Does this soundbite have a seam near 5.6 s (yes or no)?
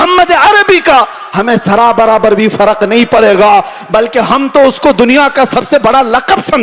no